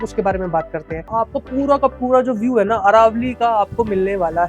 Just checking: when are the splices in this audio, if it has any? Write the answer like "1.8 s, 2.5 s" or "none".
1.1 s